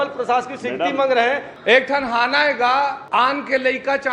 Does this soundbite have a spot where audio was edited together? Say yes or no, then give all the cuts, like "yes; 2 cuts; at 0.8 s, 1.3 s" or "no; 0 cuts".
yes; 2 cuts; at 1.5 s, 3.0 s